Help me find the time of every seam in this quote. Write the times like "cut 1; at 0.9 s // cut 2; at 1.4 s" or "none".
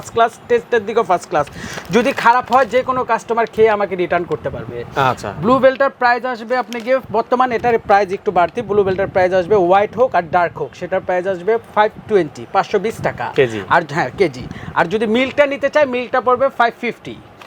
none